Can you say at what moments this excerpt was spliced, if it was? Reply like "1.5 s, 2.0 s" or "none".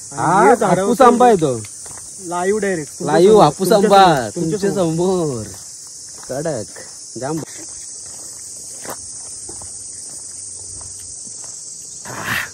7.5 s